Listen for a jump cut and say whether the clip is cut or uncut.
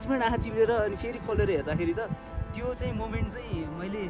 uncut